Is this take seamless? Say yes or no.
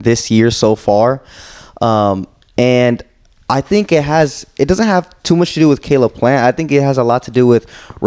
yes